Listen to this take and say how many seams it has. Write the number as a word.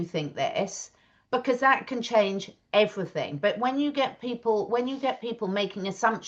zero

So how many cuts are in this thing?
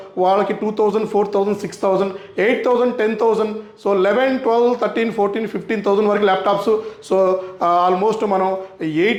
zero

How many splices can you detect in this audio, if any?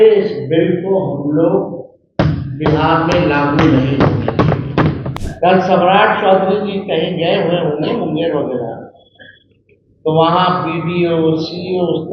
one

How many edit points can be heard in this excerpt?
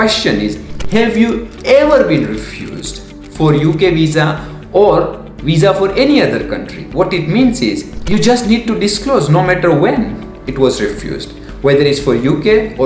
one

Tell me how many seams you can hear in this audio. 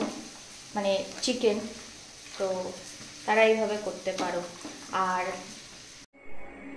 one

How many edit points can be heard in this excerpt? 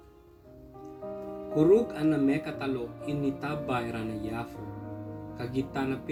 zero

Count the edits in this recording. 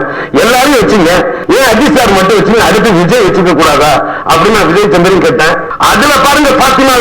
two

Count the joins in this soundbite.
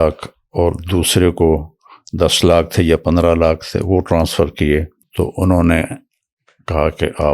one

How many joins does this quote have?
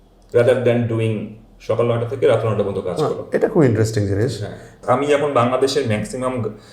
one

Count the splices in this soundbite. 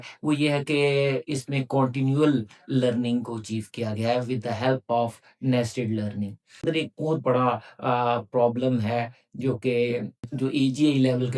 one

